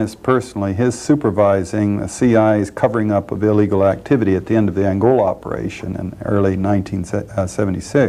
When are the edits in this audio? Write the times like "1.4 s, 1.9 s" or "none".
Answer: none